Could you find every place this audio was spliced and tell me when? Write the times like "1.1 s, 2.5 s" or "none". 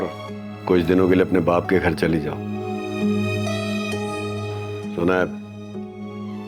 none